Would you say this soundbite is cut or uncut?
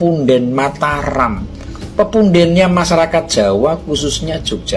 uncut